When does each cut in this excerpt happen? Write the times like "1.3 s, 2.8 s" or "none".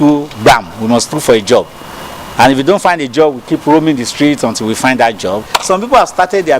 5.5 s